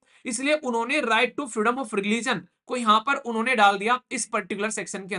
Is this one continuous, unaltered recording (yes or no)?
yes